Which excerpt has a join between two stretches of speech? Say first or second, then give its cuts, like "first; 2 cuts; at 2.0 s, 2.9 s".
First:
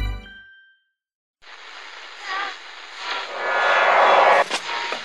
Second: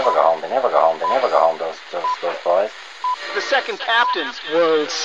first; 1 cut; at 1.5 s